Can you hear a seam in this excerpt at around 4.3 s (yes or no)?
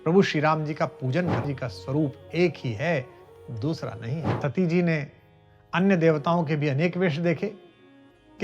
yes